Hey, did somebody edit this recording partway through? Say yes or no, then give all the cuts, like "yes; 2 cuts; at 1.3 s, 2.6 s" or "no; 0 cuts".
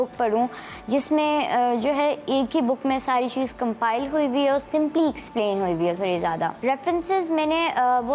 yes; 1 cut; at 6.6 s